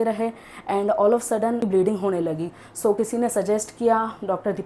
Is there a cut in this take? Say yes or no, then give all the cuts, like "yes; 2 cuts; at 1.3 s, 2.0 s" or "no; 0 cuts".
yes; 1 cut; at 1.6 s